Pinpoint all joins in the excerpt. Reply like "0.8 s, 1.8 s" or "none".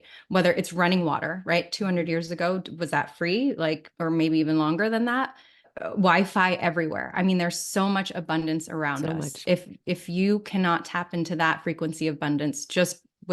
3.9 s, 5.7 s

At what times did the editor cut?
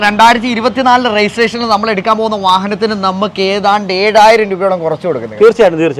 none

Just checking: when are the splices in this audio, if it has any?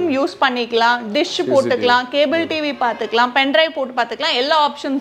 none

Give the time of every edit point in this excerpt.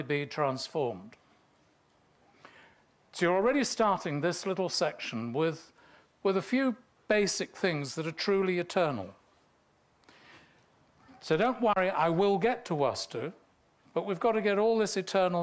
13.0 s

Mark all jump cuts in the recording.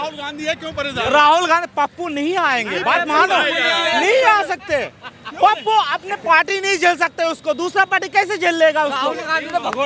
none

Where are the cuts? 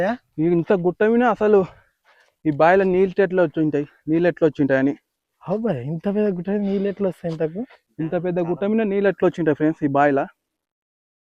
none

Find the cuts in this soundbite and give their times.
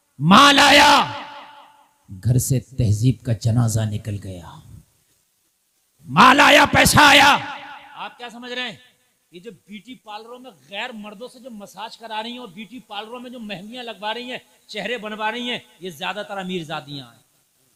none

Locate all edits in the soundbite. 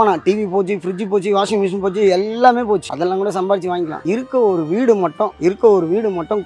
2.9 s, 4.0 s, 5.3 s

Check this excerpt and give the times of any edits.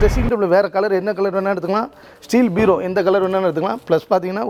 none

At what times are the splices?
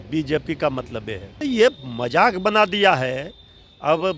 1.3 s

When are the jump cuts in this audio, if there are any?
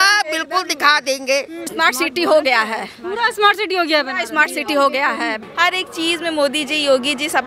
1.7 s, 5.4 s

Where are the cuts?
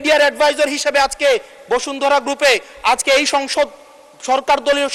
none

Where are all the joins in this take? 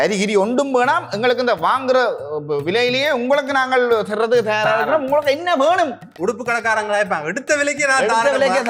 none

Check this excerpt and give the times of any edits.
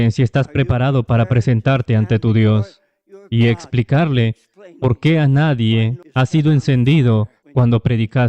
6.0 s, 7.4 s

